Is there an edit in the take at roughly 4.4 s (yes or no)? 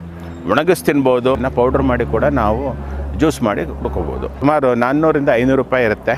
yes